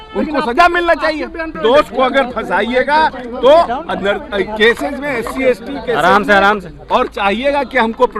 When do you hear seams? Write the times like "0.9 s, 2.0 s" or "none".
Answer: 1.6 s

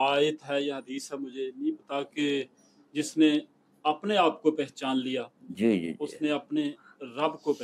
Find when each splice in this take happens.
none

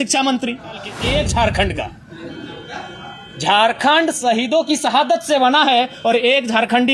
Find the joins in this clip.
0.9 s

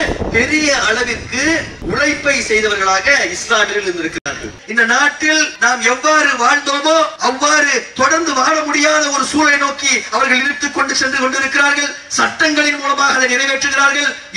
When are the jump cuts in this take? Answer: 1.7 s, 4.6 s, 5.5 s, 7.1 s

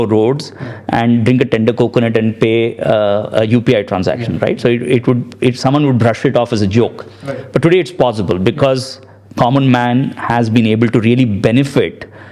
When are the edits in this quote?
none

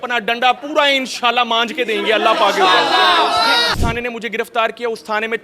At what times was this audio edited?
3.7 s

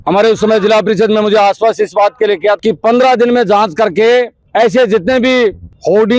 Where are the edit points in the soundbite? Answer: 2.6 s

